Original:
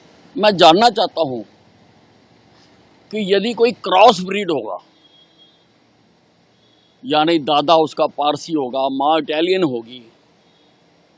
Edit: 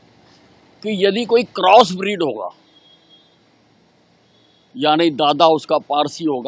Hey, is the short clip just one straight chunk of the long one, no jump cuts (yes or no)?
yes